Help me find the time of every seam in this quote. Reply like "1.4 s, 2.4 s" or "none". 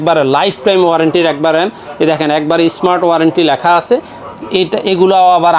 none